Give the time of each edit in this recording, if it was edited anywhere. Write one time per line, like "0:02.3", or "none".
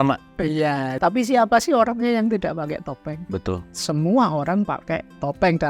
0:00.9
0:03.7